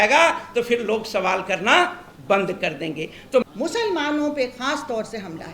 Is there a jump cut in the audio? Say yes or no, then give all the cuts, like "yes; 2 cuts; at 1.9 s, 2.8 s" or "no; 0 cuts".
yes; 1 cut; at 3.4 s